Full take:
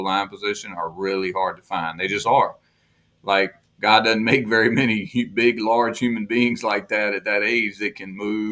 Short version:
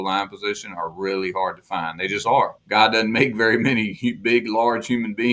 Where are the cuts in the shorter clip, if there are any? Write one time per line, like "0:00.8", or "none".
0:02.6